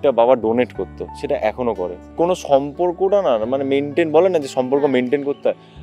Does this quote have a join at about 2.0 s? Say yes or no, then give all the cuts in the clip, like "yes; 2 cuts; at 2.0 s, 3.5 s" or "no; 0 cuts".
yes; 1 cut; at 2.0 s